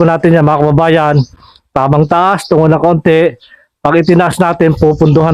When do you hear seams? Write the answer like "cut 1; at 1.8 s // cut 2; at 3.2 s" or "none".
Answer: none